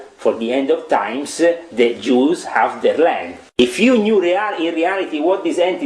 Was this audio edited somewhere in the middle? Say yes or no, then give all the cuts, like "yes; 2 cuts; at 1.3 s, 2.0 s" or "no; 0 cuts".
yes; 1 cut; at 3.6 s